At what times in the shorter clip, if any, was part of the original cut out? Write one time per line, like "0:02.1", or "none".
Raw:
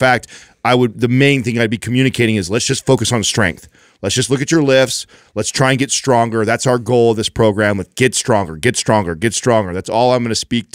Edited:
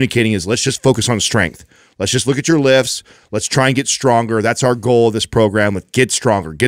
none